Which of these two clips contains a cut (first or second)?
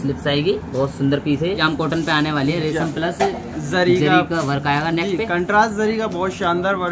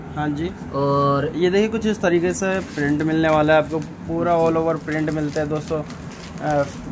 first